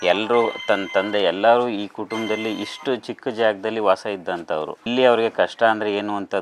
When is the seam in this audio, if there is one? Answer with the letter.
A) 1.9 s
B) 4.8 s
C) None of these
B